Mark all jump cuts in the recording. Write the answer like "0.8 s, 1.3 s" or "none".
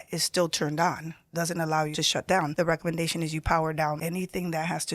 2.4 s, 4.0 s